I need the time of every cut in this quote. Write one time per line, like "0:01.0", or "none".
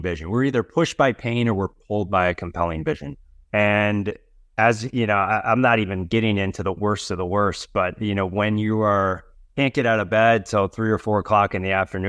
none